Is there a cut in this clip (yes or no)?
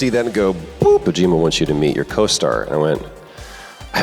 yes